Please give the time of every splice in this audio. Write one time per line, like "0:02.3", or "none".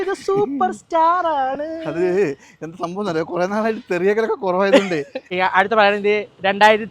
0:05.2